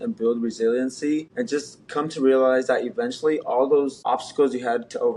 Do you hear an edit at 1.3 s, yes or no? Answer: yes